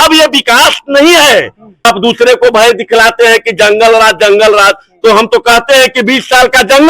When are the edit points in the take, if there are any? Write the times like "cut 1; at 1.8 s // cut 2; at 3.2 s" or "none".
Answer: cut 1; at 1.8 s